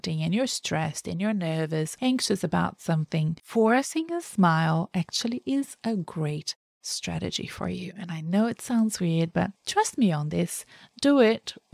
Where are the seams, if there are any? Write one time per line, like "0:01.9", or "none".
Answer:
0:01.9
0:03.4